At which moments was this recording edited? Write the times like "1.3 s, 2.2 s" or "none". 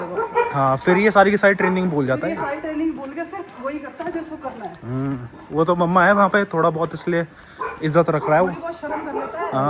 none